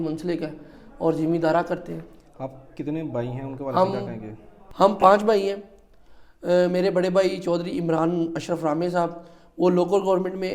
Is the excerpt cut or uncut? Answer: uncut